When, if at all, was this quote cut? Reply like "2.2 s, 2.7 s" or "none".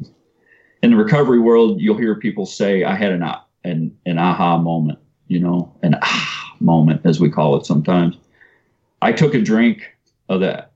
none

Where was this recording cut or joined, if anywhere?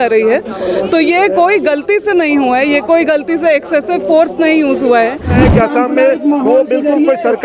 5.4 s

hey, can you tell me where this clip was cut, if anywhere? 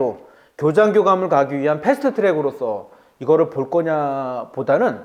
none

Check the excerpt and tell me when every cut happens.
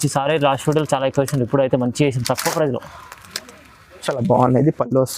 4.0 s

